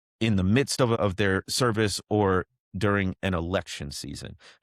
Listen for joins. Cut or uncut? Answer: cut